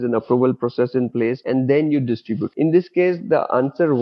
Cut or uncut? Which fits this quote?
cut